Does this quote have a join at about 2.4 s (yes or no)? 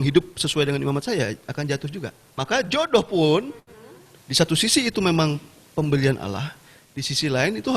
yes